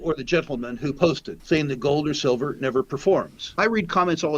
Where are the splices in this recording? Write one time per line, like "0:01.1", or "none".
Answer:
0:01.3
0:03.4